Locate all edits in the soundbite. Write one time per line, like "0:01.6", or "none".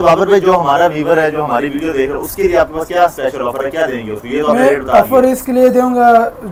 none